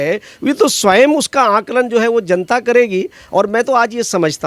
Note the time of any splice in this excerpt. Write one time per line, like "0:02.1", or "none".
none